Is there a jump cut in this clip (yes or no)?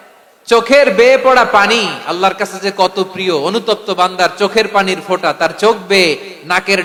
no